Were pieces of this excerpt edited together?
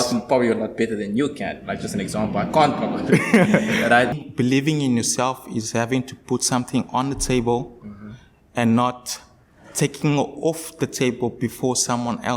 yes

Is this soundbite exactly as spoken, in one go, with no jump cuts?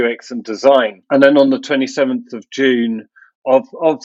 no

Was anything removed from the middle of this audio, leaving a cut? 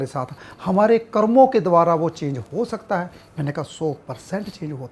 no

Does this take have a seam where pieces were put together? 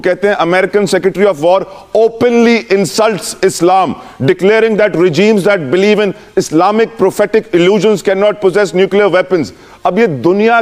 no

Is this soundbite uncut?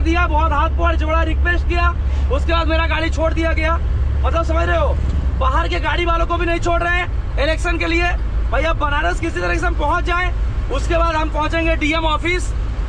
yes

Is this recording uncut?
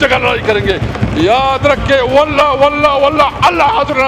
yes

